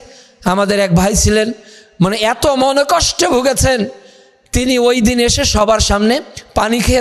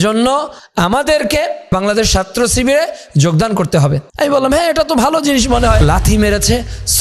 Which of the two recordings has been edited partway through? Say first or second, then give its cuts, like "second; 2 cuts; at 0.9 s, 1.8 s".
second; 3 cuts; at 1.7 s, 4.1 s, 5.8 s